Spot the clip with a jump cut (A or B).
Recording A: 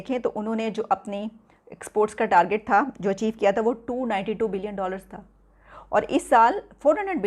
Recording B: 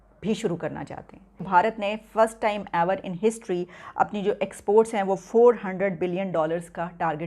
B